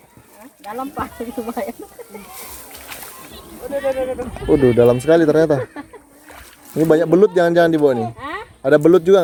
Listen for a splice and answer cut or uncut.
uncut